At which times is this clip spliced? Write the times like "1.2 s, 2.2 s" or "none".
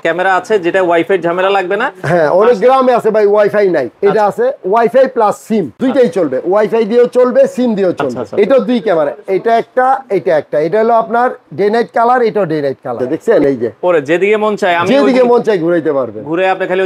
3.9 s, 5.8 s, 8.1 s, 13.2 s